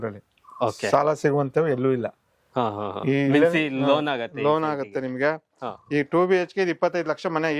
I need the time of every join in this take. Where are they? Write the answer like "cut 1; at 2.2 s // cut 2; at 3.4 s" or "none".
none